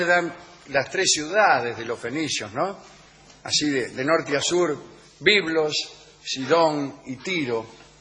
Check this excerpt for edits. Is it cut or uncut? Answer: cut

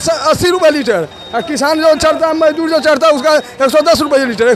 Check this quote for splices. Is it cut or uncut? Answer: uncut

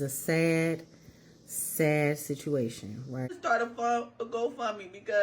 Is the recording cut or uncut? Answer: cut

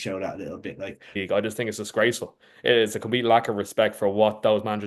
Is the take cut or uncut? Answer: cut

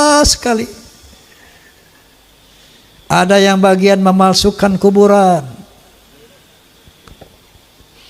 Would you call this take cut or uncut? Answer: uncut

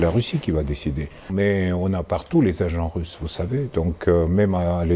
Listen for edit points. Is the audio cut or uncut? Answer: cut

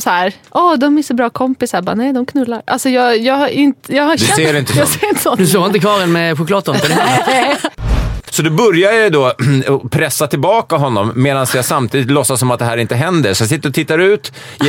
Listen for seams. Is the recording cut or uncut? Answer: cut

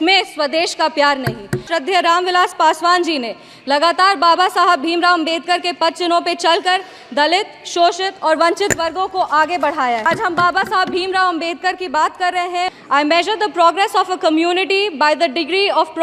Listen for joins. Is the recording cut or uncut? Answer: cut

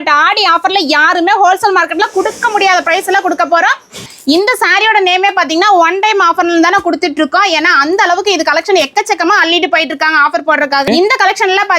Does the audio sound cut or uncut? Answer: cut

